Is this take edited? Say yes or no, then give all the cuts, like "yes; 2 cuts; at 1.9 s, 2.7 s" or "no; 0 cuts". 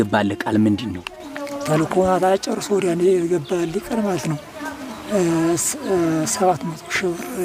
no; 0 cuts